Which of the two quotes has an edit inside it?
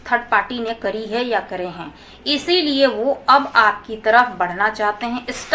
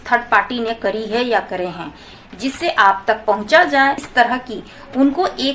second; 2 cuts; at 2.1 s, 4.0 s

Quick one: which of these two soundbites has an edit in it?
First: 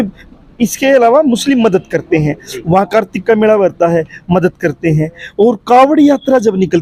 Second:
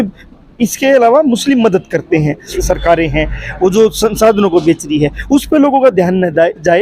second; 1 cut; at 2.6 s

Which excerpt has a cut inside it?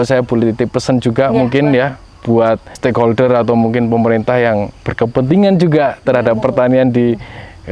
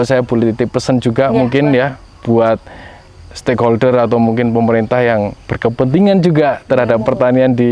first; 1 cut; at 2.7 s

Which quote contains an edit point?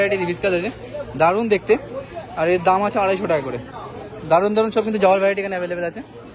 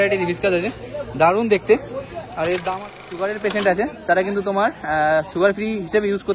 second; 1 cut; at 3.0 s

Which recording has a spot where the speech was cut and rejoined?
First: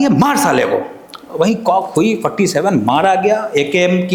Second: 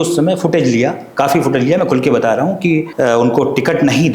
second; 1 cut; at 2.9 s

